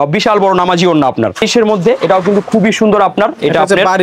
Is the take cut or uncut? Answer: uncut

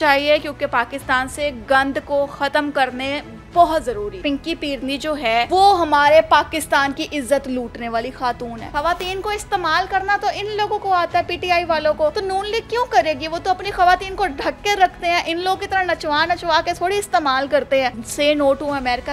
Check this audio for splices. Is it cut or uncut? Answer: cut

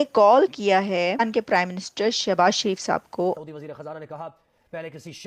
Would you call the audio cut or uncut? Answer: cut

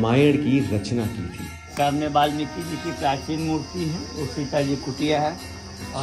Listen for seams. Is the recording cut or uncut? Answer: cut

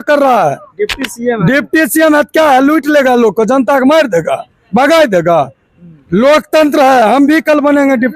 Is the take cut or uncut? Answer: uncut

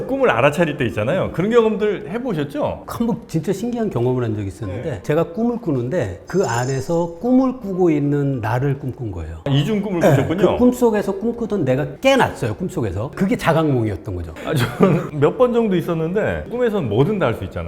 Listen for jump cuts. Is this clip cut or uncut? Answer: cut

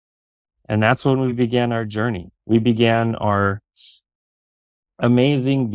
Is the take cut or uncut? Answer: uncut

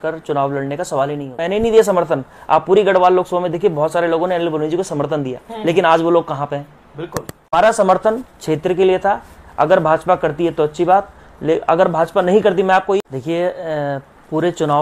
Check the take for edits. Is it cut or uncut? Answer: cut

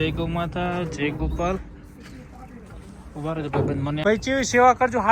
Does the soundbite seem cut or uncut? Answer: cut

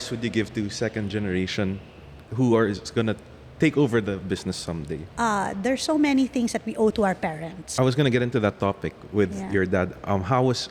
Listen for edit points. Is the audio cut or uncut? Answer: cut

